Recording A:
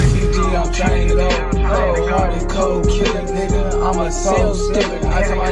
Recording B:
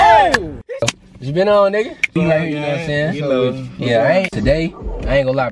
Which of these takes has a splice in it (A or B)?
B